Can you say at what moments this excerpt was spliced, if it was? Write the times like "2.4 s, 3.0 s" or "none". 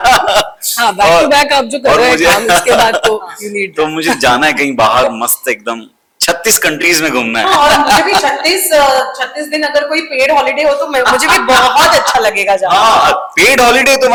none